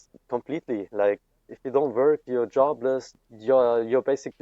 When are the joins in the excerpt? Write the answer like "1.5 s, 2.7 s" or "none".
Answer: 1.5 s, 3.1 s